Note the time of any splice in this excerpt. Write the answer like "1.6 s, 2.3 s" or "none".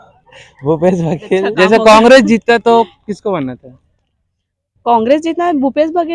1.4 s